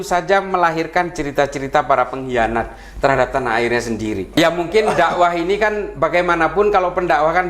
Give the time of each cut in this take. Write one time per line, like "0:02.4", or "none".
0:04.3